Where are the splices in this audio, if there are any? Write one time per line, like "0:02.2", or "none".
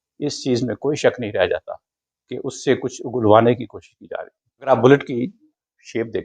0:04.7